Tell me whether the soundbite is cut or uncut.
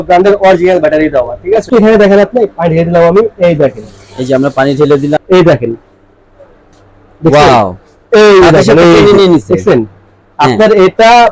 cut